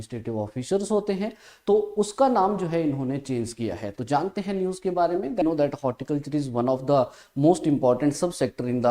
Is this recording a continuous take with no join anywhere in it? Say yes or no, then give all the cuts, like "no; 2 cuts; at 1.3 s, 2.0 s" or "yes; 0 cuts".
no; 1 cut; at 5.4 s